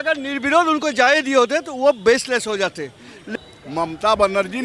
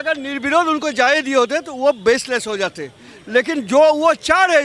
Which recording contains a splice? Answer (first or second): first